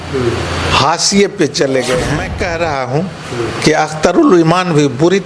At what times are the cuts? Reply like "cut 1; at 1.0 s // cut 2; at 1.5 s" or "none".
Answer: cut 1; at 2.3 s